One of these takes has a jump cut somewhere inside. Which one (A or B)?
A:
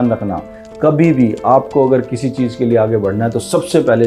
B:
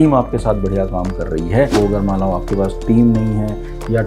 B